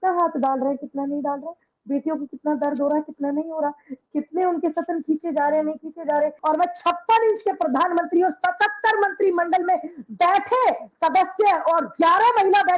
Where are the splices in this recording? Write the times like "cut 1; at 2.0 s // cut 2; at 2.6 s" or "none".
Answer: cut 1; at 6.4 s

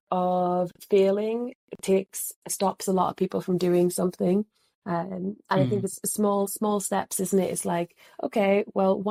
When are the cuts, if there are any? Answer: none

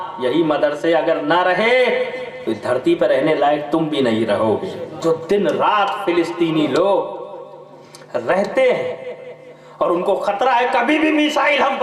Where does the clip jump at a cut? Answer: cut 1; at 5.0 s

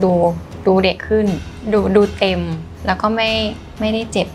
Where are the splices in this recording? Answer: cut 1; at 1.5 s // cut 2; at 2.7 s

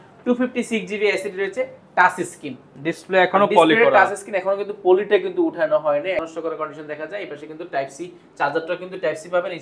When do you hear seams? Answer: cut 1; at 6.2 s

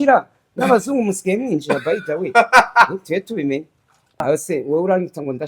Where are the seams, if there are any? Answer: cut 1; at 4.1 s

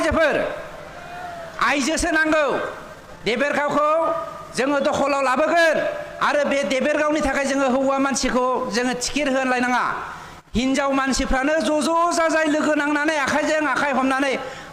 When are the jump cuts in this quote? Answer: none

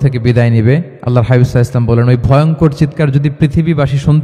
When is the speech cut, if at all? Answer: cut 1; at 1.0 s

